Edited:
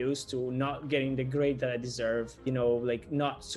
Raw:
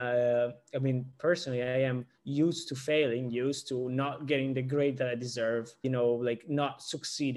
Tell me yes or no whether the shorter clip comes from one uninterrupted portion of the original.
yes